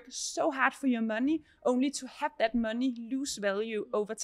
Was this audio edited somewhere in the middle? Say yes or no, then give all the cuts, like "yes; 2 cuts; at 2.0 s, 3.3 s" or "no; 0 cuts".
no; 0 cuts